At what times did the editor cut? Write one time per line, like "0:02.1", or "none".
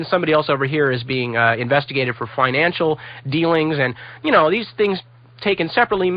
none